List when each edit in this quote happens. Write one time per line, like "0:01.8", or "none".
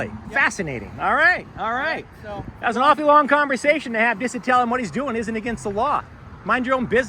none